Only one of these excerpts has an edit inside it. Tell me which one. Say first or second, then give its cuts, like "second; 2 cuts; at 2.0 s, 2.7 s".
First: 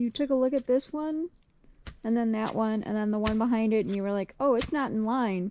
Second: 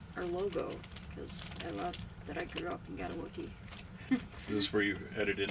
second; 2 cuts; at 1.0 s, 4.1 s